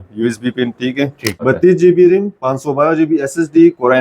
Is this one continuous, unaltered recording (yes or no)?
no